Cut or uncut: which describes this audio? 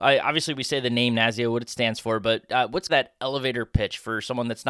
cut